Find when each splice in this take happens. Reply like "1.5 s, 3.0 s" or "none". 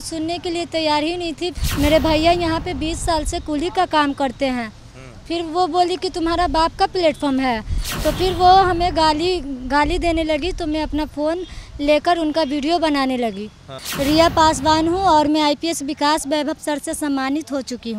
1.6 s, 13.8 s